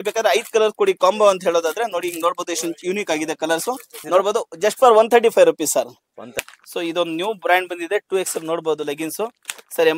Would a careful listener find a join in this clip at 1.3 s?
no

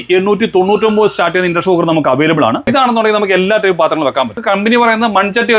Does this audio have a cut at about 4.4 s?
yes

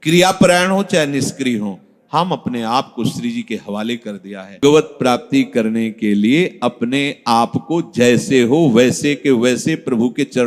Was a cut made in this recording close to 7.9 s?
no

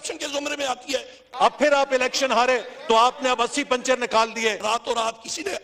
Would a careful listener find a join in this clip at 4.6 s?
yes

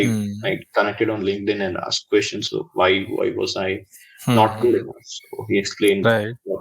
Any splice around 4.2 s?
no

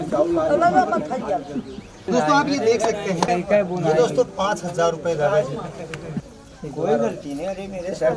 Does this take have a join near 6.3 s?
yes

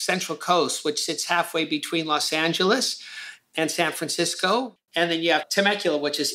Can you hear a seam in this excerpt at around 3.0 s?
no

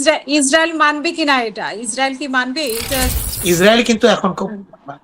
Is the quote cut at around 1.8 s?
no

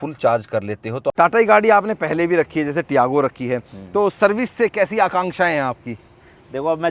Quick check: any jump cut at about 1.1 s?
yes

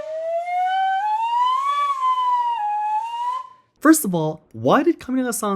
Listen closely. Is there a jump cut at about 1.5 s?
no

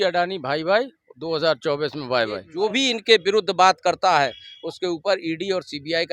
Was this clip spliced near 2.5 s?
yes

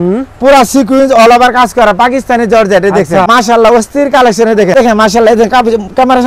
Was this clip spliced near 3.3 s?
yes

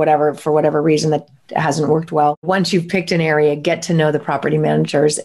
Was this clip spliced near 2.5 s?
yes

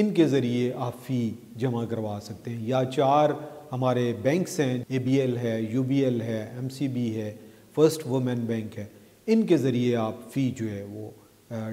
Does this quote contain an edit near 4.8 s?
yes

